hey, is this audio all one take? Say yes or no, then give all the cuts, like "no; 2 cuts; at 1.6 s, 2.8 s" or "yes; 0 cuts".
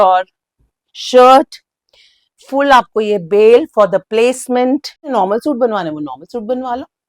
no; 1 cut; at 5.1 s